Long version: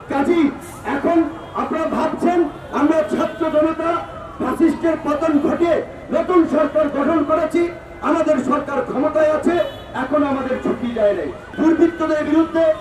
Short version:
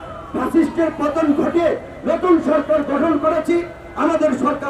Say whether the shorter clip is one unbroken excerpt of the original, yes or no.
yes